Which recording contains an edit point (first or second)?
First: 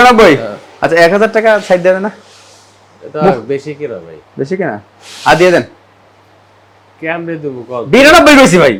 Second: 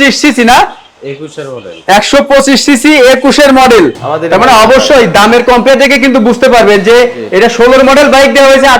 second